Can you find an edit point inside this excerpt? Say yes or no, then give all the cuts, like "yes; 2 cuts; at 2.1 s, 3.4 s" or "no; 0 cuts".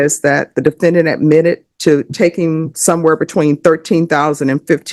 no; 0 cuts